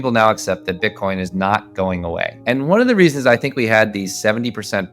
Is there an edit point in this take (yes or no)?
yes